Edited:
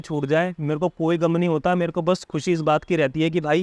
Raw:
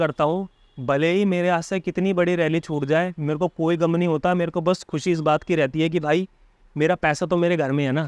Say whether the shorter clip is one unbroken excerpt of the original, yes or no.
yes